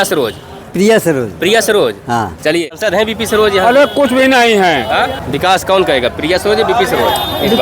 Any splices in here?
yes; 2 cuts; at 2.7 s, 5.2 s

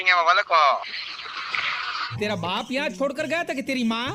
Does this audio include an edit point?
no; 0 cuts

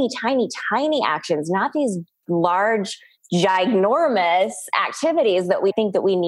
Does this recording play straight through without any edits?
yes; 0 cuts

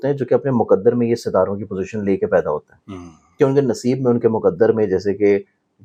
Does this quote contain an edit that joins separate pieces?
no; 0 cuts

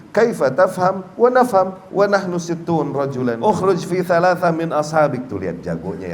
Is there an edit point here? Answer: yes; 1 cut; at 3.4 s

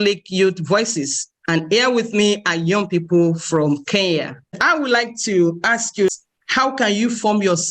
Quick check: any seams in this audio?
yes; 2 cuts; at 4.6 s, 6.1 s

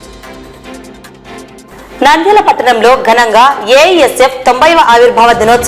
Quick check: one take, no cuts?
yes; 0 cuts

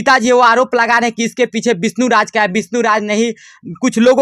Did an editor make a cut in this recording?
no; 0 cuts

